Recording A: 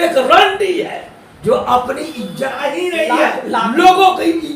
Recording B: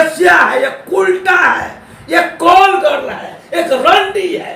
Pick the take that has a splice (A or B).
A